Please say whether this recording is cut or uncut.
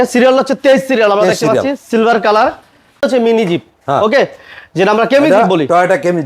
cut